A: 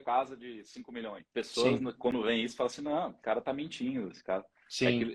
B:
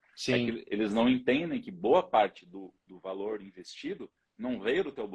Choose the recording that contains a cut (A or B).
A